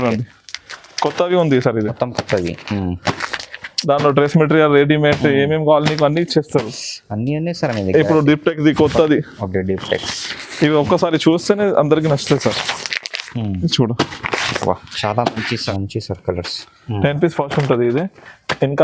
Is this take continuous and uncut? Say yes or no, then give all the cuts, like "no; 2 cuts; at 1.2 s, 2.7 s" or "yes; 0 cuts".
no; 1 cut; at 15.7 s